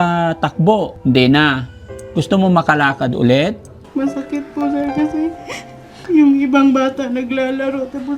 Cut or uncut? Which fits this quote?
cut